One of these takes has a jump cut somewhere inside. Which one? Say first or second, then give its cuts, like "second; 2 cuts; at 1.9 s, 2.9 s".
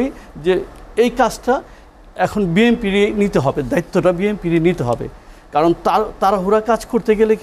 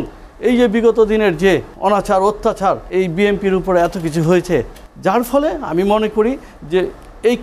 second; 3 cuts; at 1.7 s, 2.8 s, 4.8 s